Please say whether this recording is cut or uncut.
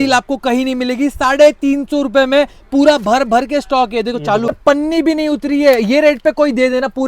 cut